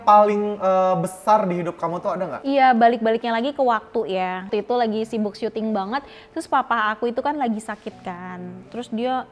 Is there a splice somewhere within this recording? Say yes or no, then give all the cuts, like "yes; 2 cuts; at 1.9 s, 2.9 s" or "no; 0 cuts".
yes; 1 cut; at 4.5 s